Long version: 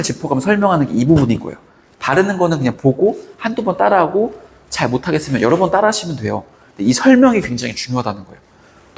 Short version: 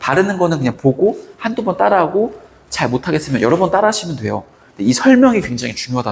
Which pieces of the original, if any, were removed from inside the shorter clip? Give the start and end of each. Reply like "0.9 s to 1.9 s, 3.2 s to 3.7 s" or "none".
none